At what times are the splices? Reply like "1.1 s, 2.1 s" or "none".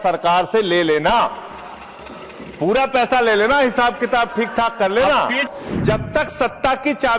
5.5 s